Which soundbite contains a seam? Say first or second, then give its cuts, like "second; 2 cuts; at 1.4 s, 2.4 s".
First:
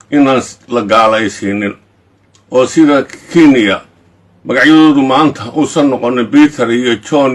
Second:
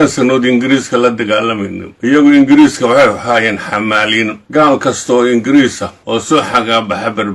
second; 3 cuts; at 2.1 s, 4.4 s, 6.2 s